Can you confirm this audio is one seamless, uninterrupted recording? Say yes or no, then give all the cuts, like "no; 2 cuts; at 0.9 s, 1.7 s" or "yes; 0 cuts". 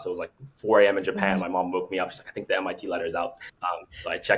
no; 1 cut; at 3.5 s